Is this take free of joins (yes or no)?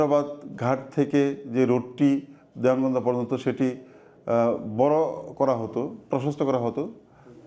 yes